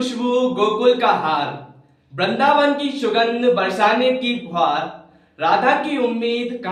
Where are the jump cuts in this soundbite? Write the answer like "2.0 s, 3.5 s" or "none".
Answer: none